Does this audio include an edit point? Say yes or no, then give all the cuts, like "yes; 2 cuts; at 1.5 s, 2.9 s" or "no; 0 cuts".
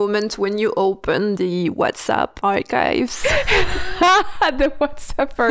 yes; 1 cut; at 2.3 s